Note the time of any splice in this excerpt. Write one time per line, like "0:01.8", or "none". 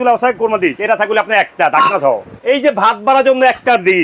0:02.3

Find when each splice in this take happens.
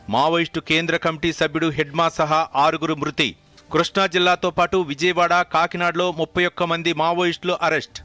none

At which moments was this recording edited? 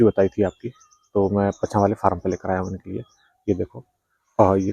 none

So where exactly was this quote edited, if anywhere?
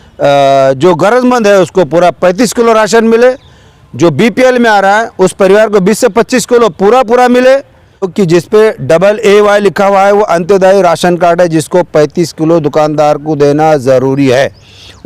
0:08.1

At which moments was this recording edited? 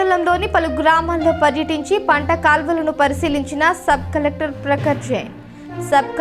none

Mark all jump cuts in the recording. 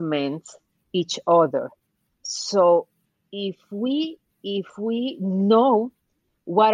none

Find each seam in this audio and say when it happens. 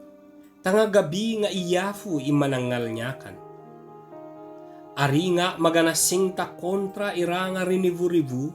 0:03.1
0:04.5

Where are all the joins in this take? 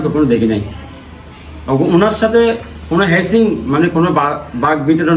none

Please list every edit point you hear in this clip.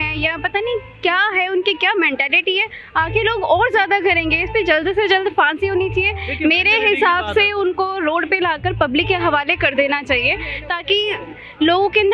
none

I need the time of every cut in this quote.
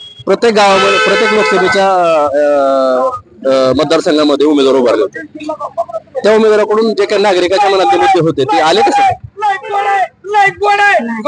none

